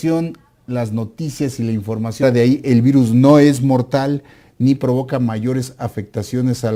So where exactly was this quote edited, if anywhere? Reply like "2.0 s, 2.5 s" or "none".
none